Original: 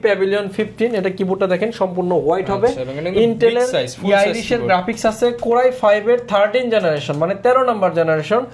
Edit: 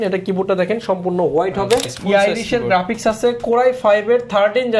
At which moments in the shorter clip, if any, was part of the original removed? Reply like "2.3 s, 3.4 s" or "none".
1.9 s